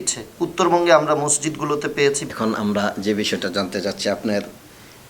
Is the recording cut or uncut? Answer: cut